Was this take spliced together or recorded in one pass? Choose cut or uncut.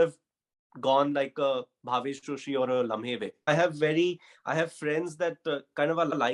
cut